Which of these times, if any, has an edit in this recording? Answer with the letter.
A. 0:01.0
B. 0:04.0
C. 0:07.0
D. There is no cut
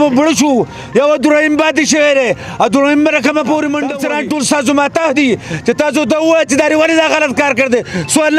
B